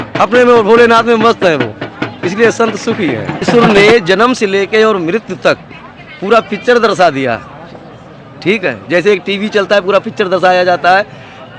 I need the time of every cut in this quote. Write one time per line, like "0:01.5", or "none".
0:03.5

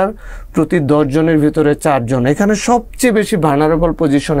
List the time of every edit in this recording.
none

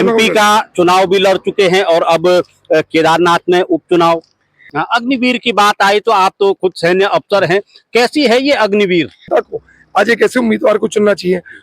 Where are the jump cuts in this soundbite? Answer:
0:04.7
0:09.2

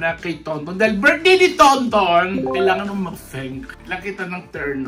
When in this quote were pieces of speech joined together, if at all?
none

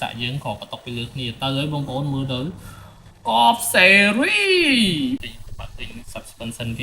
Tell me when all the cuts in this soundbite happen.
0:05.2

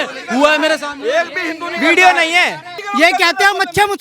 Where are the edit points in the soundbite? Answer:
0:02.8

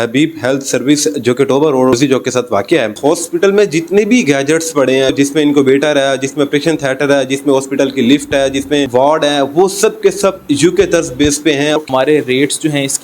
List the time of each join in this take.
0:02.9
0:05.1
0:08.9
0:11.7

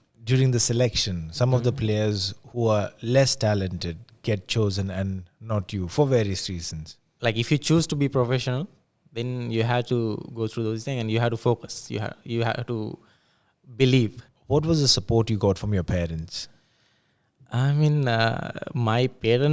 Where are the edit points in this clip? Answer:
0:07.1
0:14.3

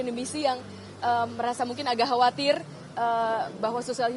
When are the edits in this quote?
none

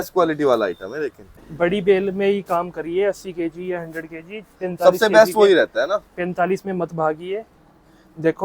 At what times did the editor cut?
0:01.5

